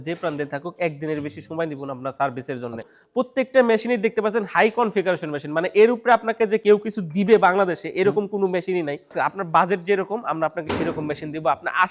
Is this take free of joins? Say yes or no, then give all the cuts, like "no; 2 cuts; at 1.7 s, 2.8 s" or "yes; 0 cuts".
no; 2 cuts; at 3.0 s, 9.1 s